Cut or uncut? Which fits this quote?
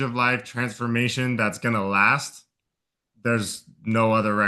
uncut